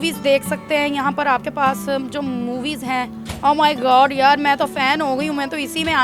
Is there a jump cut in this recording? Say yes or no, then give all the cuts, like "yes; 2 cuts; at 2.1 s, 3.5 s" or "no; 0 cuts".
no; 0 cuts